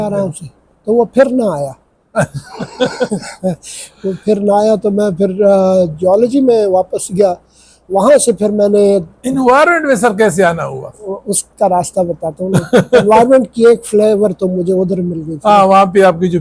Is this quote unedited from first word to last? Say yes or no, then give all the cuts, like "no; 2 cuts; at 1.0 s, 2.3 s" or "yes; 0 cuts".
yes; 0 cuts